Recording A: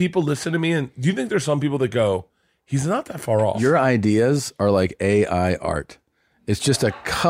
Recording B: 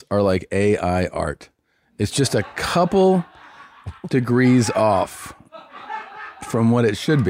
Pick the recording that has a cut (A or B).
A